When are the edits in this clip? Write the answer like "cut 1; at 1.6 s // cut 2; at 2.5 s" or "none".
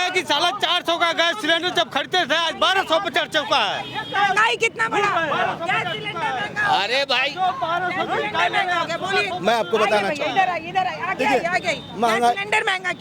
none

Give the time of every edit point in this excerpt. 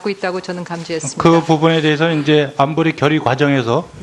cut 1; at 1.7 s

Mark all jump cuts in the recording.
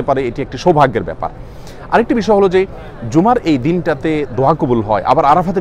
none

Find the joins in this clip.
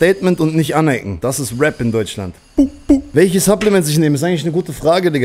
cut 1; at 1.1 s // cut 2; at 2.5 s

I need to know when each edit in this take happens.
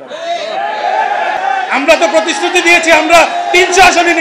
cut 1; at 1.4 s

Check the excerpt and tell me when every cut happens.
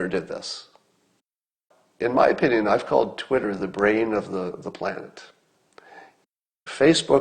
cut 1; at 1.5 s

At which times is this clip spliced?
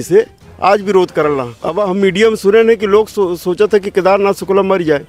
cut 1; at 1.6 s

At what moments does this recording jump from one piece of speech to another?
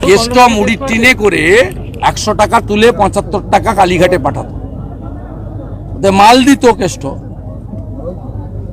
none

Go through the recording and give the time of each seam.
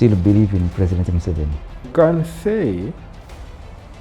cut 1; at 1.9 s

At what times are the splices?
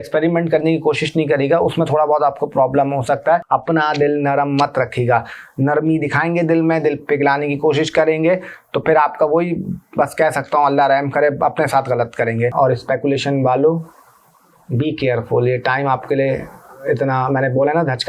cut 1; at 3.4 s // cut 2; at 12.5 s

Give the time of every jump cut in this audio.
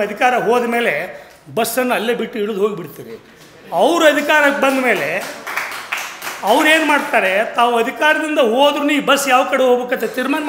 none

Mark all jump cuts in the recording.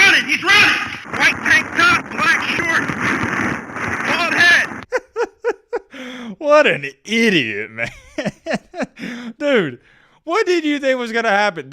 cut 1; at 0.9 s // cut 2; at 4.8 s

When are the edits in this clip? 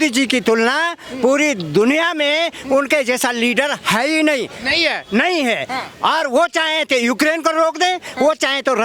none

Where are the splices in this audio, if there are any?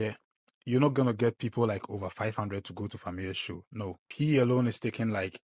cut 1; at 4.1 s

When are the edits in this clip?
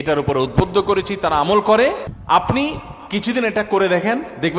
cut 1; at 2.1 s

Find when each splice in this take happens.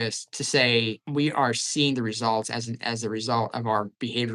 cut 1; at 1.0 s

